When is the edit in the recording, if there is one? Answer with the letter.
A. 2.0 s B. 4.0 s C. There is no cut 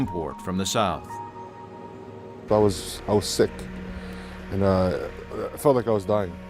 C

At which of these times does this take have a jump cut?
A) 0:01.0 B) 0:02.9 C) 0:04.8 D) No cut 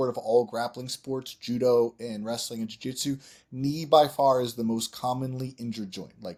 D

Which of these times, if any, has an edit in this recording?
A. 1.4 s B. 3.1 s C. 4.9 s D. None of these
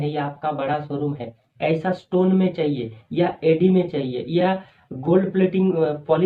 A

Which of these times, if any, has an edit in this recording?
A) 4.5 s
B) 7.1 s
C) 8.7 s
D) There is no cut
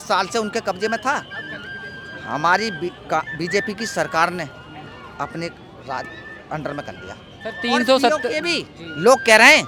D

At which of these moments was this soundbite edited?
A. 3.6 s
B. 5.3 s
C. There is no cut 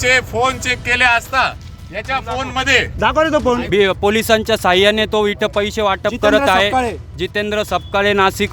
A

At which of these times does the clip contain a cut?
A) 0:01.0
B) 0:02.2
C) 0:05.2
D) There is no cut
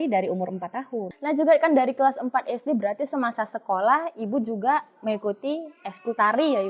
A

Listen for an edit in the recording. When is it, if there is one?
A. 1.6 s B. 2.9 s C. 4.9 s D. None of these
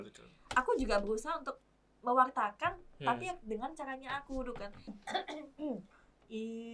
C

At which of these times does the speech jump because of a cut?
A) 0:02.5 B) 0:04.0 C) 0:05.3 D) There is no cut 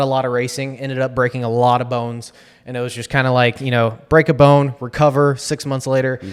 D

